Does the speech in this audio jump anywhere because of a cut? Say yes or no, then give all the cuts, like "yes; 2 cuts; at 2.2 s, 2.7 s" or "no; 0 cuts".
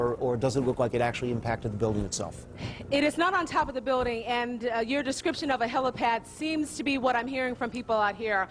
yes; 1 cut; at 2.9 s